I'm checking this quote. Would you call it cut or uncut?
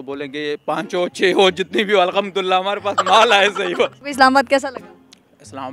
cut